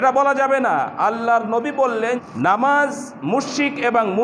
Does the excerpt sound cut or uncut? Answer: cut